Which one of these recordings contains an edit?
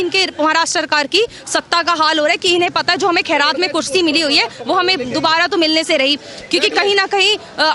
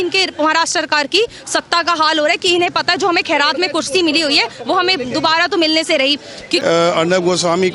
second; 1 cut; at 6.6 s

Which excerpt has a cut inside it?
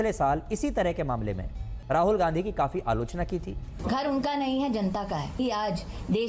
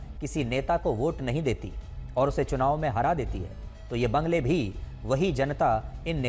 first; 2 cuts; at 3.7 s, 5.4 s

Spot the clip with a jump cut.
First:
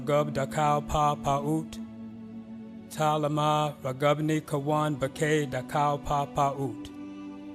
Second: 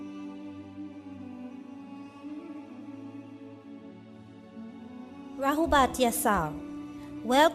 first; 1 cut; at 6.5 s

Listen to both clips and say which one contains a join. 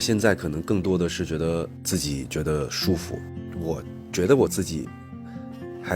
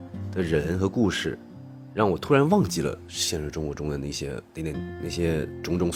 first; 2 cuts; at 1.9 s, 3.5 s

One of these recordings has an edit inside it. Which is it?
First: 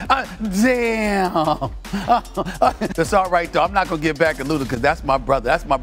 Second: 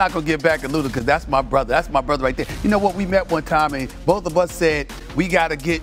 first; 1 cut; at 2.8 s

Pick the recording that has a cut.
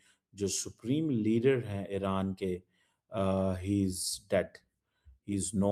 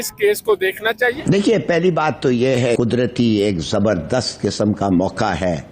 second; 1 cut; at 2.8 s

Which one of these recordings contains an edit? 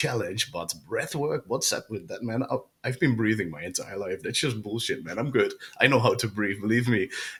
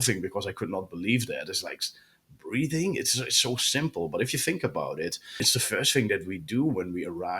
second; 1 cut; at 5.4 s

